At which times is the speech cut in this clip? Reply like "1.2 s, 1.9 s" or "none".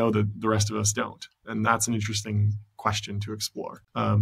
none